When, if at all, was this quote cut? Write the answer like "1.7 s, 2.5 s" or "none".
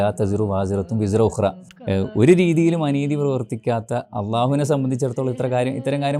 1.7 s